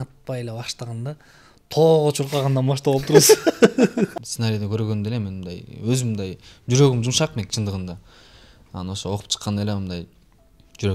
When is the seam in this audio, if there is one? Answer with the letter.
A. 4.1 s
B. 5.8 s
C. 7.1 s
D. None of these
A